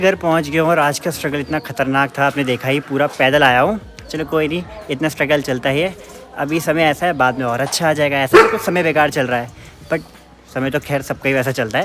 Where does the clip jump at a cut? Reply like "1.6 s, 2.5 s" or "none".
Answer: none